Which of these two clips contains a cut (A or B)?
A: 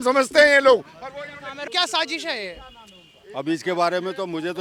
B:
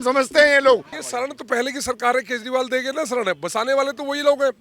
B